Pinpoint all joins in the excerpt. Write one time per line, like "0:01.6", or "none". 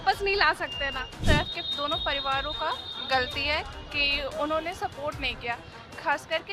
0:01.2